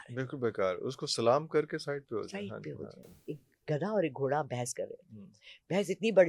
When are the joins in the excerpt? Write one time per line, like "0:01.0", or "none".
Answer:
0:03.0